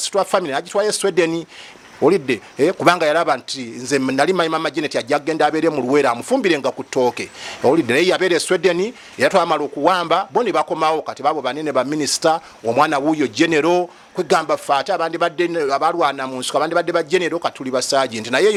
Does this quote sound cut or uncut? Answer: uncut